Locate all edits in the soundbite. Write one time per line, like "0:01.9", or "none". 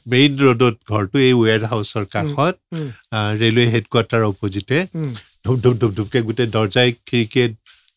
none